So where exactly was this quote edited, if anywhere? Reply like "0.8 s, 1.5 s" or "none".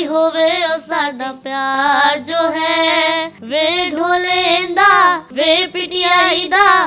none